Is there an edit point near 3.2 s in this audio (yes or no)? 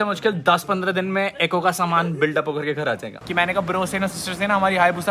yes